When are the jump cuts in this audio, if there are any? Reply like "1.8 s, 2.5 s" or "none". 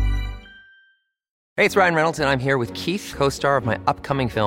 1.4 s